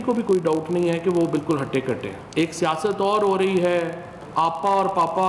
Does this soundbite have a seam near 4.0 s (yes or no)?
no